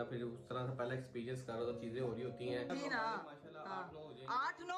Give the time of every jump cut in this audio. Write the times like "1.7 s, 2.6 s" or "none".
2.7 s